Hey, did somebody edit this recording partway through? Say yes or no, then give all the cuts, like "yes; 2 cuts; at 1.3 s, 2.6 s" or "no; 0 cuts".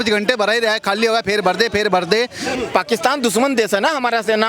yes; 1 cut; at 2.5 s